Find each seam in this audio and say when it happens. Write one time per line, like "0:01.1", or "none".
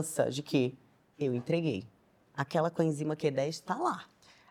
none